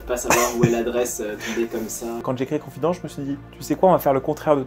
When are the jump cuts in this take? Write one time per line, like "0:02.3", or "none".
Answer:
0:02.2
0:03.5